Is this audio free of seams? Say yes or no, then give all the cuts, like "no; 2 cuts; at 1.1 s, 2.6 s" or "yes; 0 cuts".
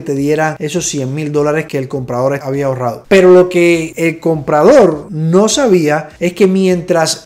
yes; 0 cuts